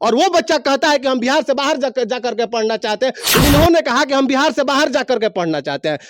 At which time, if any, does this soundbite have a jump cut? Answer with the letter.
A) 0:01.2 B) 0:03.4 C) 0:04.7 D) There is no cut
B